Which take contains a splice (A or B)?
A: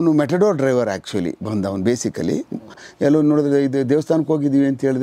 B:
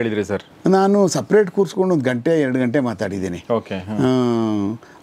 A